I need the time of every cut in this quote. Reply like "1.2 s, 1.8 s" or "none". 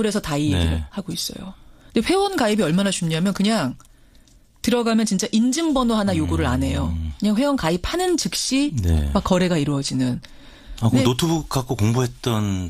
none